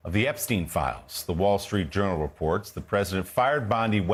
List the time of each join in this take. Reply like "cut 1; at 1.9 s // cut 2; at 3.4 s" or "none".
none